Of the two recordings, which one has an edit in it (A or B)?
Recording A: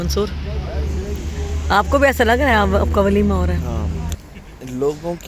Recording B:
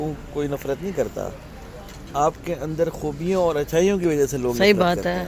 A